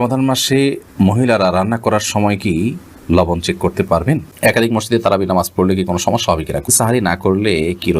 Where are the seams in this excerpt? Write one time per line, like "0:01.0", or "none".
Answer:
0:04.3
0:06.7